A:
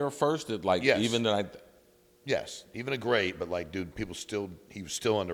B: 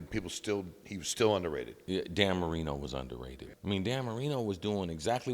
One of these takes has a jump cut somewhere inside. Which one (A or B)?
B